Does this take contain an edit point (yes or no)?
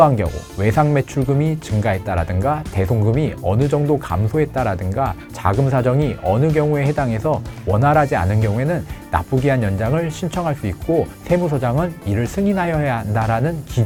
no